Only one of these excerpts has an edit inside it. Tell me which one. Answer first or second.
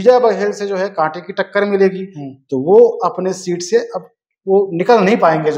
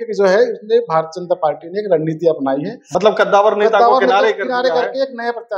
second